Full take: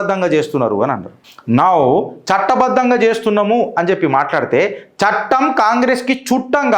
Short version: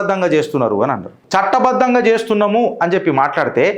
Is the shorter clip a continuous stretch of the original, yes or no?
no